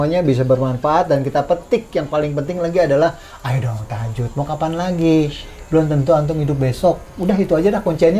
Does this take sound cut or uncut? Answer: uncut